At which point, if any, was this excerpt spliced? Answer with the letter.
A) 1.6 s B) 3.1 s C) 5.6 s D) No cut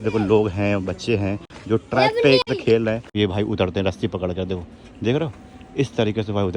B